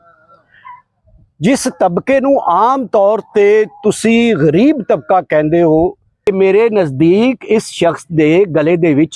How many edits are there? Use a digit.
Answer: 1